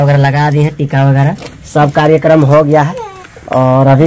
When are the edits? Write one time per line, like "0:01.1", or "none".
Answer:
none